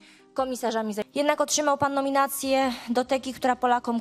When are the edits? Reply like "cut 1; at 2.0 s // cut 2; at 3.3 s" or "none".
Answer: cut 1; at 1.1 s